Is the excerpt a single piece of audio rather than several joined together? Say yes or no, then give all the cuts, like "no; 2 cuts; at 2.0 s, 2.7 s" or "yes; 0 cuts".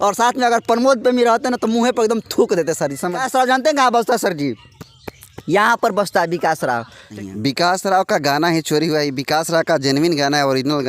no; 2 cuts; at 3.2 s, 7.0 s